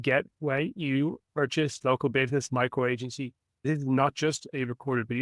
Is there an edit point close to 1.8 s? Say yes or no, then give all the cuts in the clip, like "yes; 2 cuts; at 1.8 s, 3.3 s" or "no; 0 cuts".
yes; 2 cuts; at 1.8 s, 3.6 s